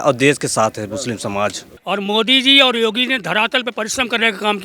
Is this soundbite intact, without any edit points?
no; 1 cut; at 1.7 s

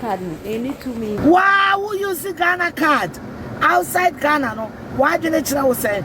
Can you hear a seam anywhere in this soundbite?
yes; 1 cut; at 1.2 s

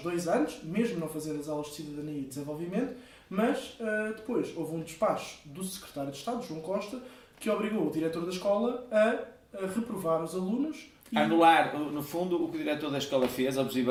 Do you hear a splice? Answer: no; 0 cuts

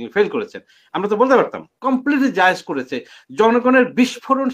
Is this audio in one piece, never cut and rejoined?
no; 1 cut; at 1.7 s

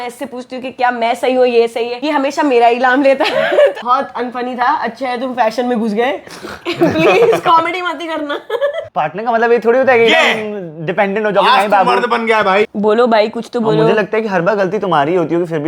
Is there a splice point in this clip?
yes; 4 cuts; at 1.9 s, 3.8 s, 8.9 s, 12.7 s

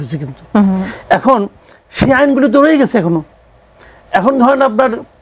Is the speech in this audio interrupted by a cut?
no; 0 cuts

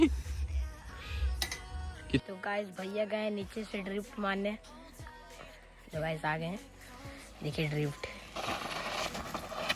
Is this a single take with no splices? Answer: no; 1 cut; at 2.2 s

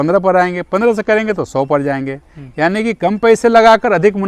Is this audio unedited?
yes; 0 cuts

